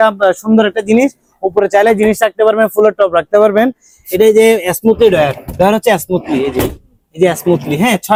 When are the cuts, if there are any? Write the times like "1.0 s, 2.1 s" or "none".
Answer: none